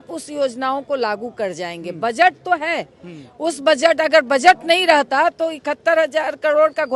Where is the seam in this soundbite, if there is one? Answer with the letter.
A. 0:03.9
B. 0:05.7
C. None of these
C